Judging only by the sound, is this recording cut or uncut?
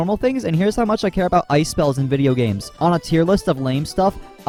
uncut